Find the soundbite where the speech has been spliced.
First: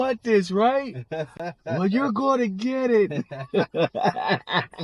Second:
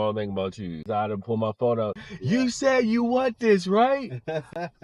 second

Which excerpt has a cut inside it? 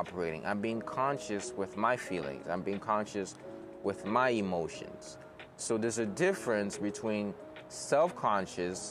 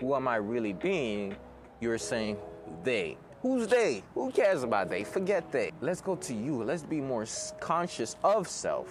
second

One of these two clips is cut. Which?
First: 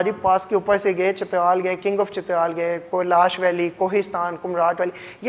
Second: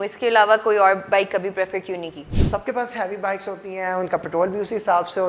second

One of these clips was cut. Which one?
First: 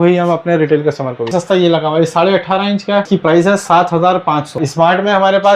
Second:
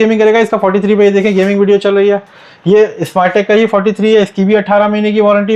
first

